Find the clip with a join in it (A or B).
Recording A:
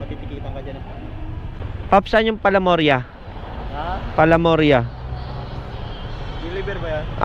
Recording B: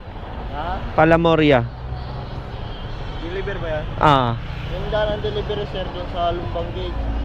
A